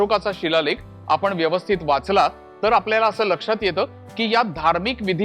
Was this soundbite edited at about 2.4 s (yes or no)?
no